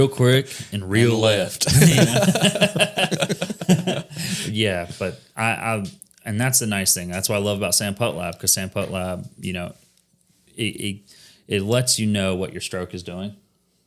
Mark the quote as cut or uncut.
uncut